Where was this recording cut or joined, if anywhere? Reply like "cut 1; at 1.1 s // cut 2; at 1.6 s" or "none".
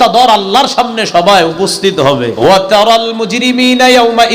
cut 1; at 2.3 s